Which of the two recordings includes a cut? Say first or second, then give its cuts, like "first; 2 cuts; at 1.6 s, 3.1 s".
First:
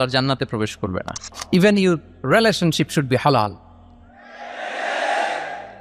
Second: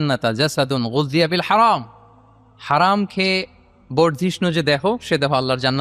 first; 1 cut; at 1.3 s